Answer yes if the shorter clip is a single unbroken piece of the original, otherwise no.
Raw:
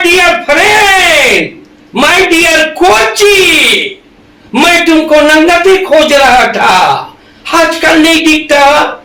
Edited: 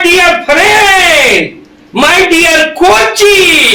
yes